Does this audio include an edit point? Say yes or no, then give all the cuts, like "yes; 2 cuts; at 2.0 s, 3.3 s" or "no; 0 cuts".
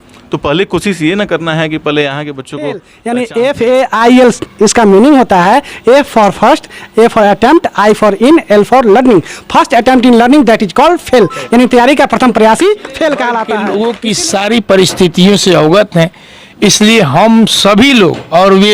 yes; 2 cuts; at 2.9 s, 13.5 s